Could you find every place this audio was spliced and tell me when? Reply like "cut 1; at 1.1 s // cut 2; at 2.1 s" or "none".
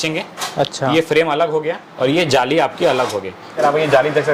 cut 1; at 1.9 s // cut 2; at 3.5 s